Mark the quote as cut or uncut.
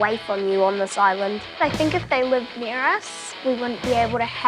cut